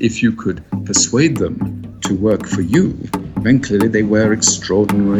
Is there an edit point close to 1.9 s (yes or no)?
no